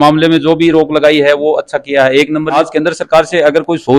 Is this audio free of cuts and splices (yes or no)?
no